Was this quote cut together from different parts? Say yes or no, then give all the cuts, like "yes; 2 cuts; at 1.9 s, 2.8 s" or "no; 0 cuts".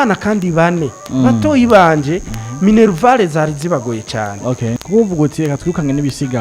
yes; 1 cut; at 4.8 s